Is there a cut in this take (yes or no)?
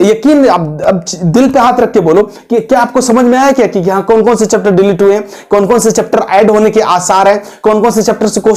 no